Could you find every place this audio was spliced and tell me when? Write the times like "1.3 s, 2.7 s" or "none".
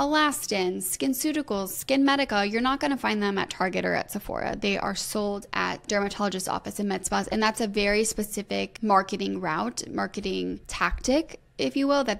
5.8 s, 8.7 s, 10.7 s

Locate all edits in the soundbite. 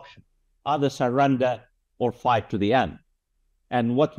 none

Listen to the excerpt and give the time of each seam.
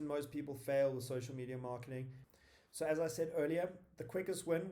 2.2 s

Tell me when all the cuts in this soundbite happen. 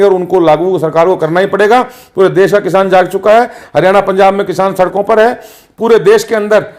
none

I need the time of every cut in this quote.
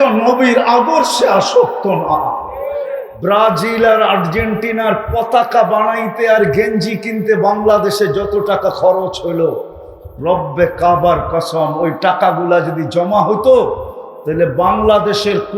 3.0 s

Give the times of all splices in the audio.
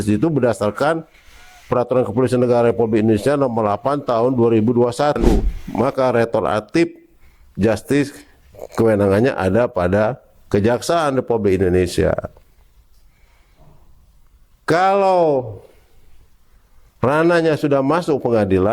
5.6 s

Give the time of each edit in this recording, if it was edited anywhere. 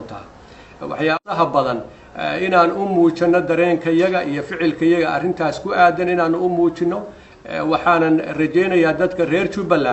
1.1 s

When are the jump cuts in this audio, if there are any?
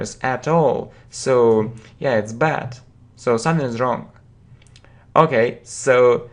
3.1 s

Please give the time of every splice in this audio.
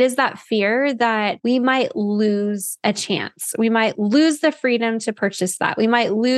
1.4 s

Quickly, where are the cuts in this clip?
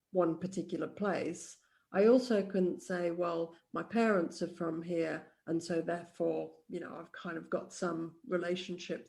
none

